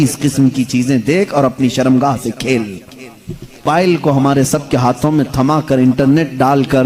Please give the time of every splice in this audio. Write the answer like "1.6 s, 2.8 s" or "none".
3.6 s